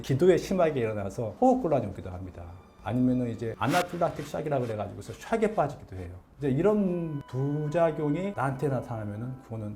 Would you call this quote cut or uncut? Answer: cut